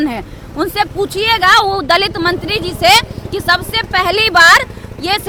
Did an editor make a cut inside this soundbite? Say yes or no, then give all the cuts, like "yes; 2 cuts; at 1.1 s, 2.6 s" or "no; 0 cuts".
no; 0 cuts